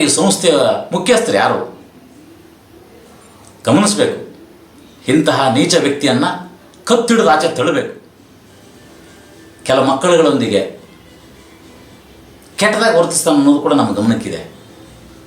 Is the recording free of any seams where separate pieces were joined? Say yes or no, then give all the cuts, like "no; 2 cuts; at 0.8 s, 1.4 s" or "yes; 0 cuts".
no; 1 cut; at 8.1 s